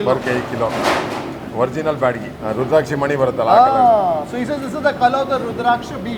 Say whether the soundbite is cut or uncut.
uncut